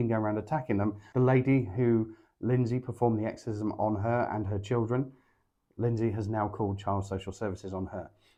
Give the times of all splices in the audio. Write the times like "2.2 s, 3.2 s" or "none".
none